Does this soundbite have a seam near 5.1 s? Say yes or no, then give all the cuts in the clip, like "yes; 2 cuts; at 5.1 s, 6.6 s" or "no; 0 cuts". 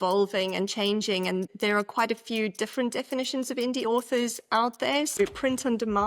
yes; 1 cut; at 5.1 s